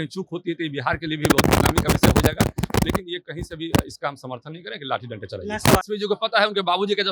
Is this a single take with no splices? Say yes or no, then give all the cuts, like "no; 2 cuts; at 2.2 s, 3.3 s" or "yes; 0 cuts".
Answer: no; 1 cut; at 5.8 s